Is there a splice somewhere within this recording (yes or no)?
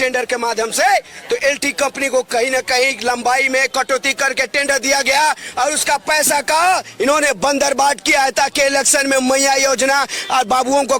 no